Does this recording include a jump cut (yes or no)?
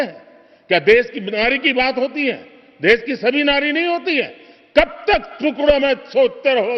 no